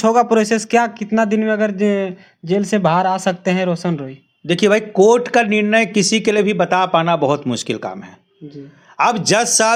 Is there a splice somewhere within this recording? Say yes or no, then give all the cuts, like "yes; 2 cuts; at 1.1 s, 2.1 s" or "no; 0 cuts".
no; 0 cuts